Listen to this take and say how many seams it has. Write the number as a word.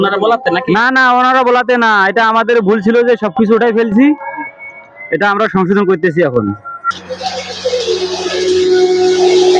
one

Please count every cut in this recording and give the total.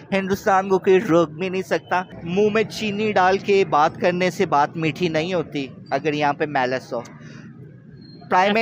one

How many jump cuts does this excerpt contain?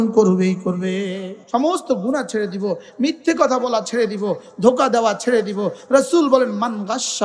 one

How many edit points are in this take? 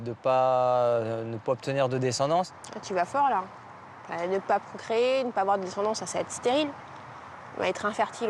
one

